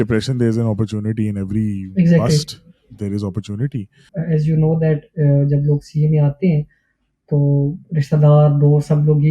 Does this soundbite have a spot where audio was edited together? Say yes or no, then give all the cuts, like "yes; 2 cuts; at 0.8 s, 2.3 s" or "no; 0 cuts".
yes; 1 cut; at 4.1 s